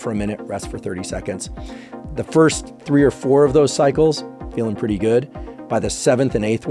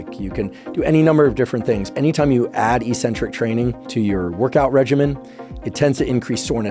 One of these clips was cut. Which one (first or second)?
second